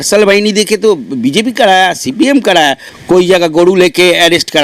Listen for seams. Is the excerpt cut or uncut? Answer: cut